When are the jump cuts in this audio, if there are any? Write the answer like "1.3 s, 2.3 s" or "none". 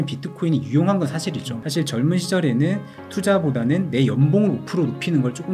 1.5 s